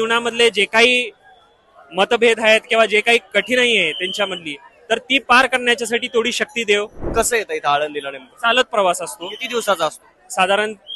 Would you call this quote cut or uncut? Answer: cut